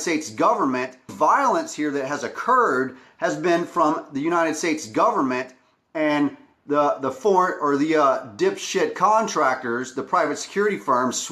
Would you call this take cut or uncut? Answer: cut